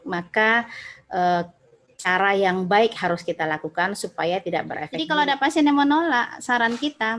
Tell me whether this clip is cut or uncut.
cut